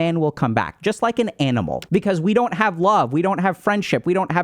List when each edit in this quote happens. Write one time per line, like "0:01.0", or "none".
0:01.8